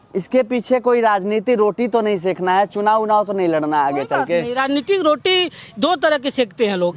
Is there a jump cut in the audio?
no; 0 cuts

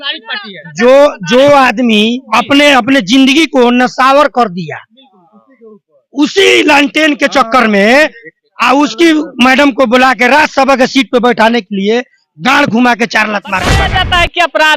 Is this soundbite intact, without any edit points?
no; 1 cut; at 13.8 s

